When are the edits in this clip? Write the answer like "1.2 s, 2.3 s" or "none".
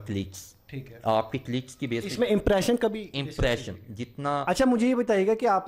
4.4 s